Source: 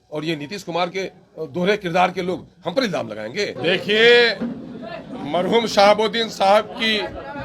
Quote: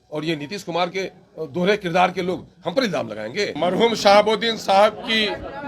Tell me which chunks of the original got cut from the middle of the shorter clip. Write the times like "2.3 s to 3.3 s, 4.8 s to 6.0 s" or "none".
3.5 s to 5.2 s

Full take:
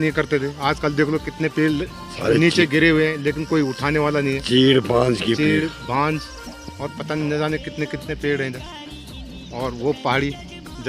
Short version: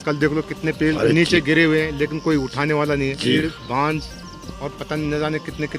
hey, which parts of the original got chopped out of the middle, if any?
1.7 s to 2.2 s, 4.6 s to 5.5 s

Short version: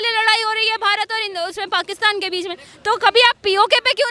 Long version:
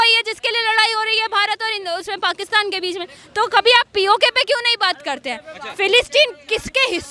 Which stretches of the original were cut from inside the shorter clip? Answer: none

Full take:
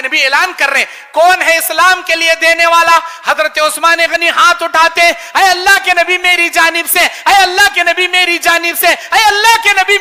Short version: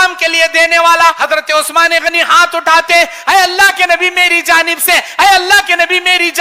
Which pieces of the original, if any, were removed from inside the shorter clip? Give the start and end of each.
3.1 s to 3.3 s

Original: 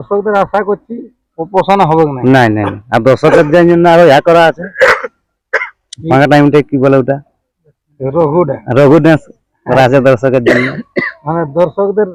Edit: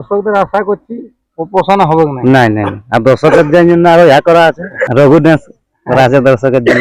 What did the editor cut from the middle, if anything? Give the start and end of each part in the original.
4.8 s to 8.6 s

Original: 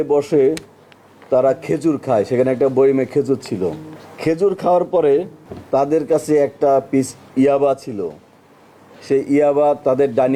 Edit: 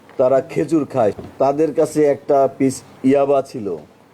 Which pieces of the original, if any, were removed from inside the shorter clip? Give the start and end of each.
2.3 s to 5.5 s

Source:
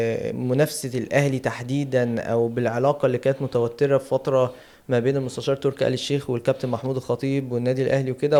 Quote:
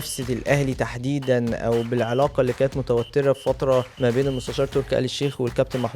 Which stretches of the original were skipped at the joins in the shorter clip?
4.6 s to 4.8 s

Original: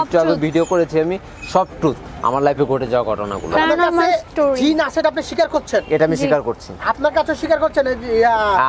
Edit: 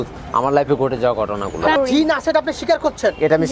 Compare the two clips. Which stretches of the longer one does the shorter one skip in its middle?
3.7 s to 4.5 s

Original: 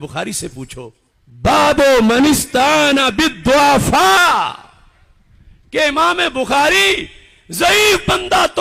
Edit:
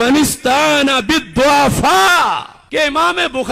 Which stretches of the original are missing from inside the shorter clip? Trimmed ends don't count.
4.6 s to 5.6 s

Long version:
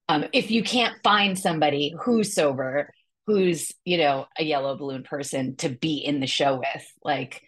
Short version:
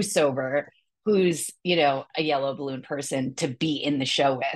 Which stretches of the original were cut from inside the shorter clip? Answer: none

